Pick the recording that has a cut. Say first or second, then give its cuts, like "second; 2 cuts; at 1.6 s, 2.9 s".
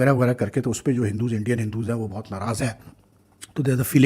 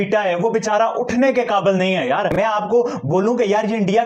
second; 1 cut; at 2.3 s